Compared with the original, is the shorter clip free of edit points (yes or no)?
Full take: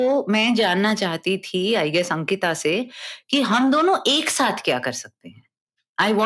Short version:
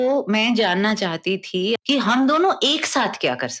no